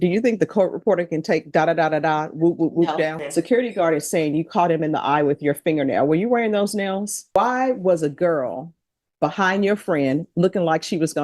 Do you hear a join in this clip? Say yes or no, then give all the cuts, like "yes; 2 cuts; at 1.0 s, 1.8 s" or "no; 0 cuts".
yes; 2 cuts; at 3.2 s, 7.2 s